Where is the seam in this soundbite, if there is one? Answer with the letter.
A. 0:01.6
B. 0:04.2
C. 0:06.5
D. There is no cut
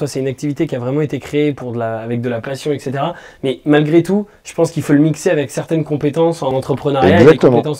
C